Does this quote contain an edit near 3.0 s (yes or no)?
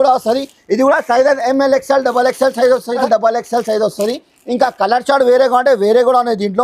yes